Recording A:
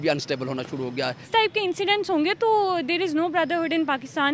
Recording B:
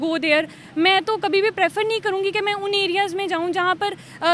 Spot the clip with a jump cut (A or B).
A